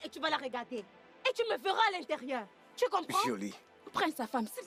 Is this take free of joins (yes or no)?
yes